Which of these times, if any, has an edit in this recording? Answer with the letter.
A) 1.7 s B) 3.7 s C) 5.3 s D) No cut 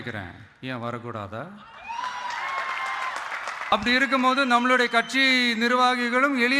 B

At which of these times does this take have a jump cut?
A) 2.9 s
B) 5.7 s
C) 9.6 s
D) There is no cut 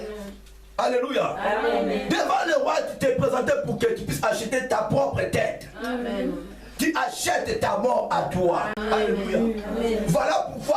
C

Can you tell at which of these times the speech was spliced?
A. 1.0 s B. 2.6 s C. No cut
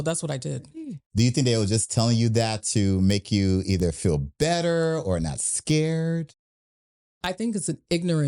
A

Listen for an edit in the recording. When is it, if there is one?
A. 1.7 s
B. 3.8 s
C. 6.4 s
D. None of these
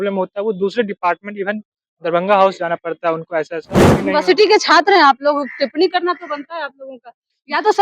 B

